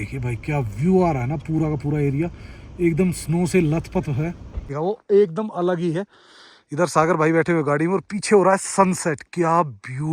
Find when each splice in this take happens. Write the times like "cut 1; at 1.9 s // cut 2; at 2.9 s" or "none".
cut 1; at 4.7 s